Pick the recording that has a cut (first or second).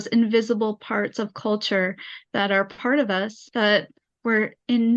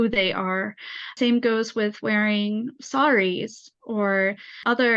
second